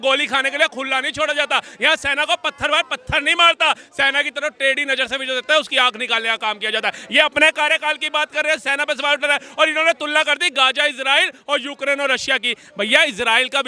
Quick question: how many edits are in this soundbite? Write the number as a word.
zero